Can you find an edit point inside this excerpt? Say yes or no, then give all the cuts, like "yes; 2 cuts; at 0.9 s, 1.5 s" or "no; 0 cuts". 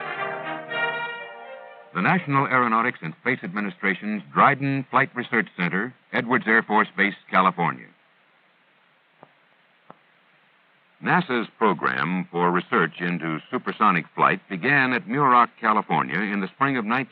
no; 0 cuts